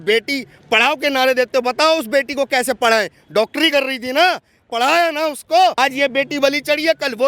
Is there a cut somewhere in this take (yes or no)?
yes